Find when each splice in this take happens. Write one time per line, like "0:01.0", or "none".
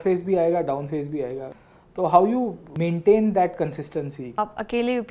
0:01.5
0:02.6
0:04.3